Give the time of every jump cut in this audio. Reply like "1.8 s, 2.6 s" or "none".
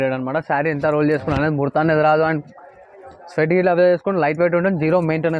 none